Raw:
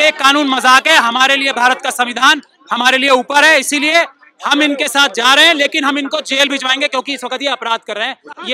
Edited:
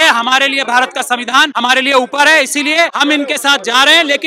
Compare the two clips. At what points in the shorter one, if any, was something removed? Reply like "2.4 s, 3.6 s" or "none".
1.5 s, 2.9 s

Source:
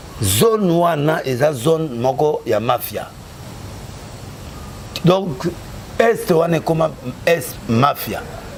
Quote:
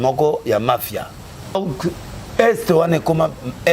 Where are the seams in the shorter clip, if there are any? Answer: 1.6 s

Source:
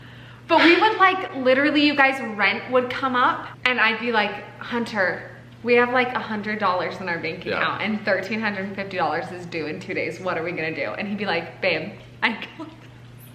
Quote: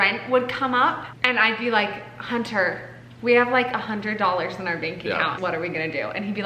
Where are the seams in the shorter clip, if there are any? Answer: 5.3 s

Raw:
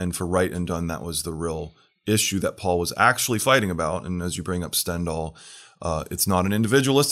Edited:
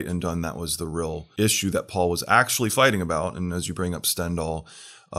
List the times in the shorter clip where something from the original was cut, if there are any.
1.2 s

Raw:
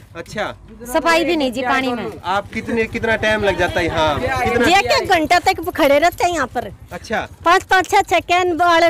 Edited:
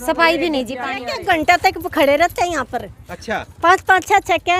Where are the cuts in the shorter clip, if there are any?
1.1 s

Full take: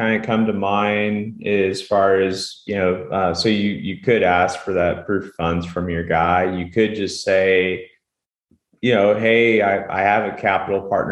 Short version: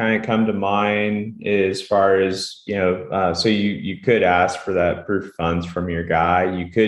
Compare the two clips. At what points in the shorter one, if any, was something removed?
none

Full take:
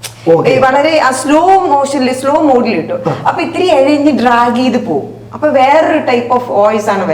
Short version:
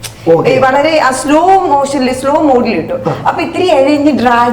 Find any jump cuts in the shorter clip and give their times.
none

